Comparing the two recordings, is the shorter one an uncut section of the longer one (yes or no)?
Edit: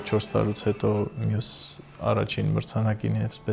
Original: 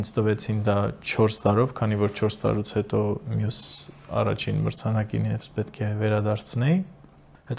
yes